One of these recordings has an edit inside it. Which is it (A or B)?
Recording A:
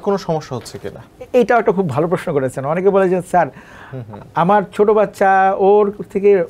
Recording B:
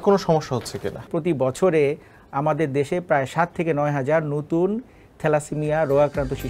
B